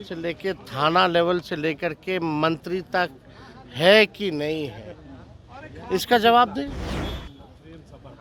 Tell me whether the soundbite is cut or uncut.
uncut